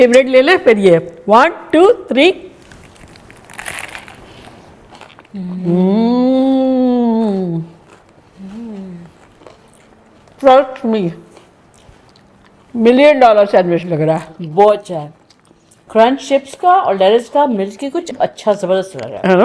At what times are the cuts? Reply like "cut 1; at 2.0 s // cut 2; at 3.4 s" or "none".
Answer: cut 1; at 1.1 s